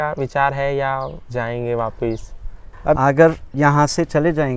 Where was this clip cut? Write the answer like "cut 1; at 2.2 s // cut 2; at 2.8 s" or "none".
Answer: cut 1; at 3.0 s